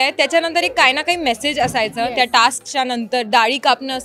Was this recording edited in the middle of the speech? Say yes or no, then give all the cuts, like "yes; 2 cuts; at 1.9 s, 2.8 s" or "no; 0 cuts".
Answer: no; 0 cuts